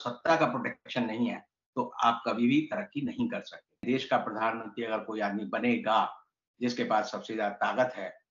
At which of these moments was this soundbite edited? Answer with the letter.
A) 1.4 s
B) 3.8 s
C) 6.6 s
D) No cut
B